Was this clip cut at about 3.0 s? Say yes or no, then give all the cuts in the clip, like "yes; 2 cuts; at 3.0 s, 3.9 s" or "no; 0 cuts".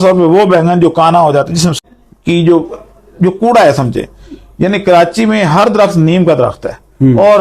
no; 1 cut; at 1.8 s